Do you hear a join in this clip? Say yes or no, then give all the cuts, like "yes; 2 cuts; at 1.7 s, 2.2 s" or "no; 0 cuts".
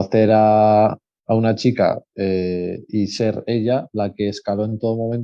no; 0 cuts